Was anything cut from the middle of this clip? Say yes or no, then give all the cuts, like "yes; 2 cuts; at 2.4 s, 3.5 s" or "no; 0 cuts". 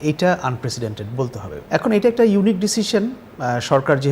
yes; 1 cut; at 1.5 s